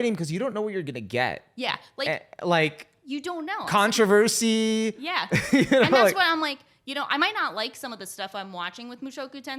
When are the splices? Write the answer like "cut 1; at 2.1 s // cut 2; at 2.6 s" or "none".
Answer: none